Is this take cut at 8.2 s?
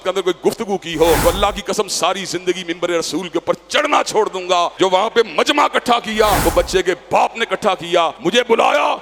yes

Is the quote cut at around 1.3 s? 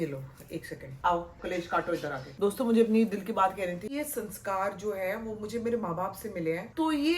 yes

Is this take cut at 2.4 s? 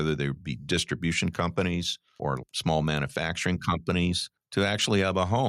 yes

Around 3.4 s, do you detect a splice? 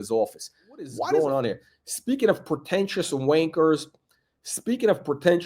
no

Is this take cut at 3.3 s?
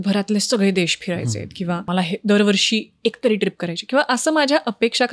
no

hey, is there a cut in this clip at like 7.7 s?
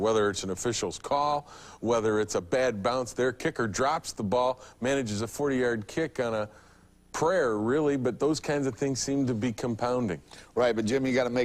no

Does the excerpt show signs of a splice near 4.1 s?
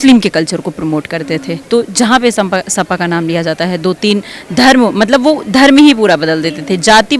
no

